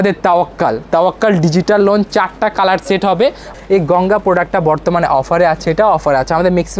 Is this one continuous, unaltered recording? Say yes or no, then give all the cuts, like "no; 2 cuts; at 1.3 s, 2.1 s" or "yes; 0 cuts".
no; 1 cut; at 3.4 s